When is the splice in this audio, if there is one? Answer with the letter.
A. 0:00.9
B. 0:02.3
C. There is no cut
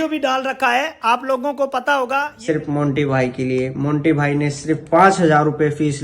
B